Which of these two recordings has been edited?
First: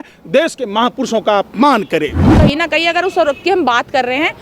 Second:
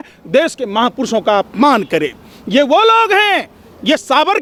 first; 1 cut; at 2.3 s

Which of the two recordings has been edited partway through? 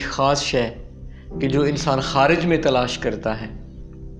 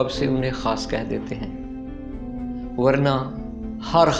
second; 2 cuts; at 1.4 s, 2.7 s

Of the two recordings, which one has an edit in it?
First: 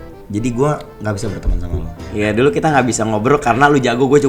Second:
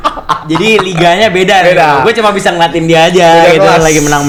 first; 1 cut; at 2.0 s

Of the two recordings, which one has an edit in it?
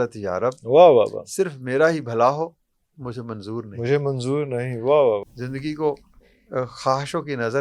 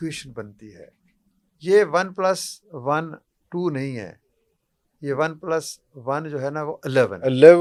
first; 1 cut; at 5.2 s

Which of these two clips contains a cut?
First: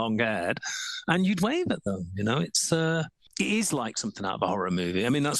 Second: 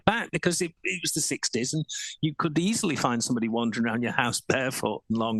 first; 1 cut; at 3.2 s

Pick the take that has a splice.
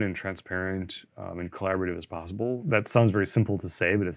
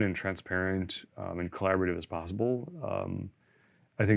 first; 1 cut; at 2.6 s

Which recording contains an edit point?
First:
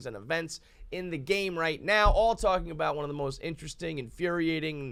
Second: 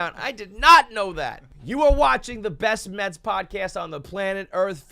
second; 1 cut; at 1.6 s

